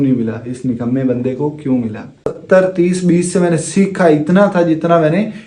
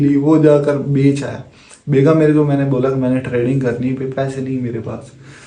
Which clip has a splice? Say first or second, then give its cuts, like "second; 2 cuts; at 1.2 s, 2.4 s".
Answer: first; 1 cut; at 2.3 s